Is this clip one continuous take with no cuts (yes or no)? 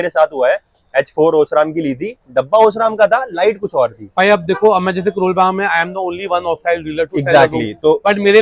yes